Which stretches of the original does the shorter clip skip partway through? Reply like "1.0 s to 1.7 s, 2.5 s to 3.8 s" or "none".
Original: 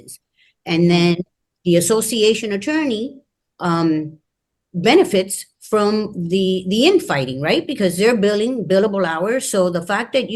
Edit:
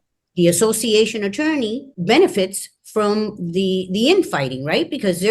3.2 s to 4.6 s